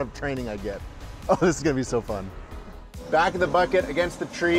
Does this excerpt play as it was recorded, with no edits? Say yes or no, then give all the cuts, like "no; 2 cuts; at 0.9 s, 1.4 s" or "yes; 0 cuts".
no; 1 cut; at 2.9 s